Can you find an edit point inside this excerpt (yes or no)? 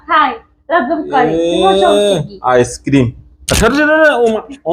yes